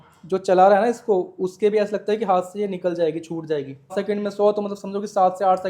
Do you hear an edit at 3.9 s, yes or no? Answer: yes